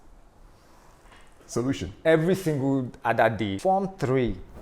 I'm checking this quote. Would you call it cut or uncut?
cut